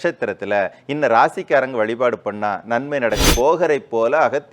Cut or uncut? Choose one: cut